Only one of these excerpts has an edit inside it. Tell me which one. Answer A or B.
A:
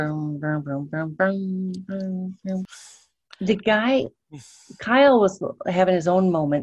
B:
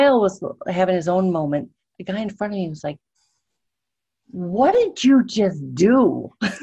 A